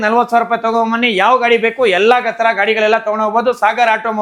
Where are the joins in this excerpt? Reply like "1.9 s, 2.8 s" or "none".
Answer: none